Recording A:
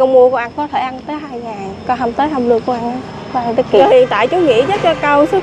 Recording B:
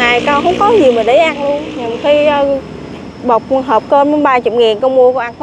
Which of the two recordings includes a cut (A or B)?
A